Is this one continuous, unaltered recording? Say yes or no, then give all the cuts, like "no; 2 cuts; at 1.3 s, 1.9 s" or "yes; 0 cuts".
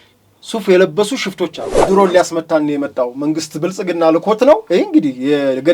no; 1 cut; at 1.8 s